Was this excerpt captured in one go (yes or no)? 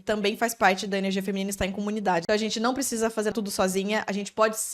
no